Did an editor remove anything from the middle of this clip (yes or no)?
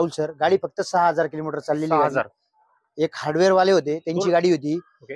no